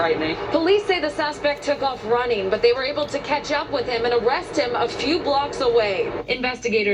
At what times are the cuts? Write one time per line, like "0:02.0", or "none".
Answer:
0:01.6